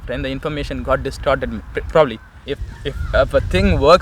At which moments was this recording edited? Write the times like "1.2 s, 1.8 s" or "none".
2.4 s